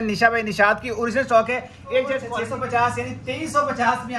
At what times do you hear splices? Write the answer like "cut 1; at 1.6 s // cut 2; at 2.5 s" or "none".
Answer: cut 1; at 2.3 s